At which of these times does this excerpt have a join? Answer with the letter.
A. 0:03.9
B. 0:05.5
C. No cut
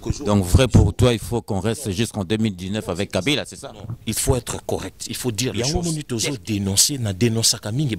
B